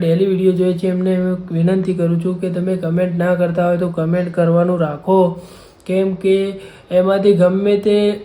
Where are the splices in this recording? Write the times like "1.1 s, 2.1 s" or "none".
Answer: none